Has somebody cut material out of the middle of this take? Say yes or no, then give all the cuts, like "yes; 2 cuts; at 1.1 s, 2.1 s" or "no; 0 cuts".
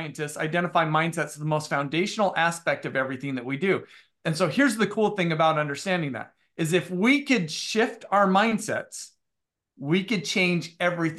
no; 0 cuts